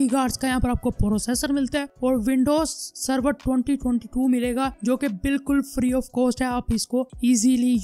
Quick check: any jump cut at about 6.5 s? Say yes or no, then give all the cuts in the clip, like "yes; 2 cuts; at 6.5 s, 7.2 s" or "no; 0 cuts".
no; 0 cuts